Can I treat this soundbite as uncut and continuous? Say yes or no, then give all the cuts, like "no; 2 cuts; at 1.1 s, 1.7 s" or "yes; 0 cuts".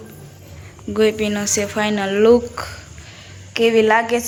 yes; 0 cuts